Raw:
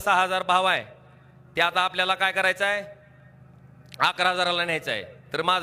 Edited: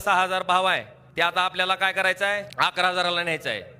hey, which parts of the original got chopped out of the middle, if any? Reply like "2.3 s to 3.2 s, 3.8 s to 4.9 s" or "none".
1.0 s to 1.4 s, 2.9 s to 3.9 s